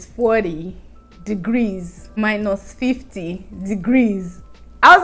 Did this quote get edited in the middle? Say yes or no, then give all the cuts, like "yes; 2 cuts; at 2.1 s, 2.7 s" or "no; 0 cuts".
yes; 1 cut; at 2.0 s